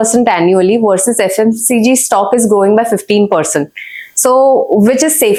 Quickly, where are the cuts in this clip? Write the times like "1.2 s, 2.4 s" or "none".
none